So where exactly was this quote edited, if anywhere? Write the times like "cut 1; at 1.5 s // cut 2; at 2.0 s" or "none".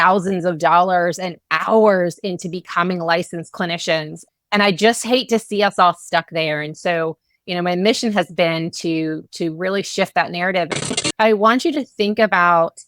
cut 1; at 11.0 s

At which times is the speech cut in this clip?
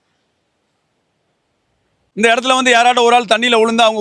cut 1; at 2.0 s

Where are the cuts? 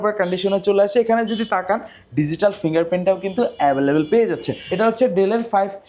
cut 1; at 4.6 s

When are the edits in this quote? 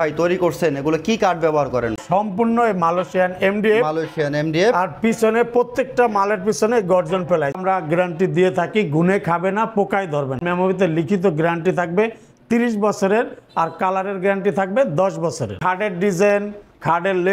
cut 1; at 2.0 s // cut 2; at 7.5 s // cut 3; at 10.4 s // cut 4; at 15.6 s

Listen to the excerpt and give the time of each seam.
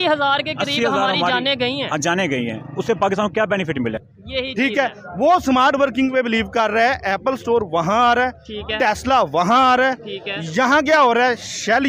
cut 1; at 4.0 s

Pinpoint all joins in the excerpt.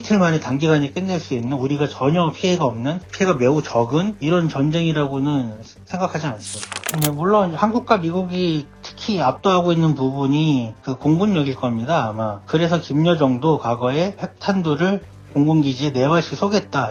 none

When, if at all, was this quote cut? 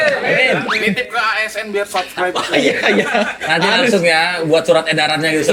none

